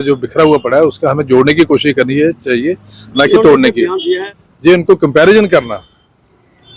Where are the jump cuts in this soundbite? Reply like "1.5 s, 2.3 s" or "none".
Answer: 4.3 s

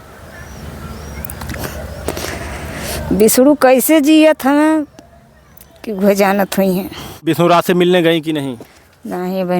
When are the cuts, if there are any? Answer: 7.2 s

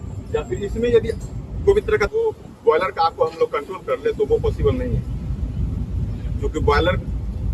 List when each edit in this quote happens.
2.1 s

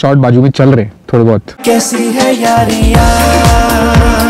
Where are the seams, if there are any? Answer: 1.6 s

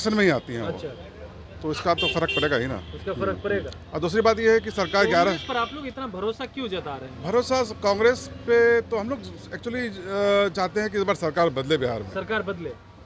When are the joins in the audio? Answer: none

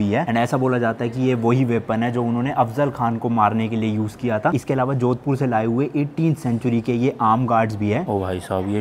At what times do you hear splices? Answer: none

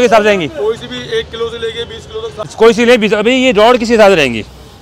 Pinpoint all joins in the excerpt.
2.4 s

